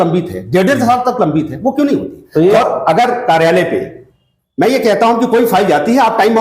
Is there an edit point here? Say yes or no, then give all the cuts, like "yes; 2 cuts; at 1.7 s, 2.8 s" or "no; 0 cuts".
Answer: yes; 1 cut; at 2.6 s